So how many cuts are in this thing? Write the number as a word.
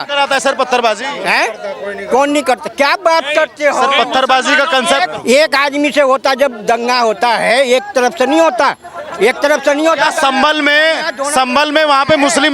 zero